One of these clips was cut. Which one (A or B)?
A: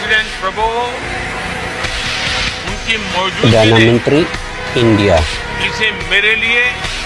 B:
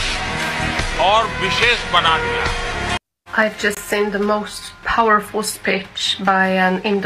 B